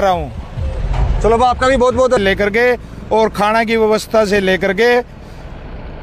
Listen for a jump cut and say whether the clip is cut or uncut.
cut